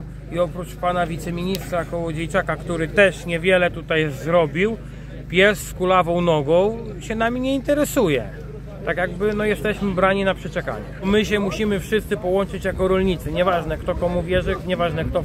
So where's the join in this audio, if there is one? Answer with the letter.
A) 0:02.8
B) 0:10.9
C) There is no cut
B